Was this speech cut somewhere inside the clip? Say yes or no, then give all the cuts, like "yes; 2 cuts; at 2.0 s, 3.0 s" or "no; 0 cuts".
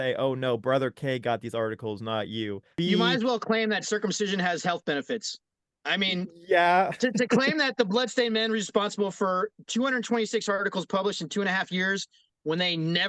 yes; 1 cut; at 2.6 s